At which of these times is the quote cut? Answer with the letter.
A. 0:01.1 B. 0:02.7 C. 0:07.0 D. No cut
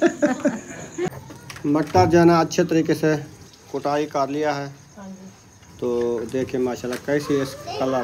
A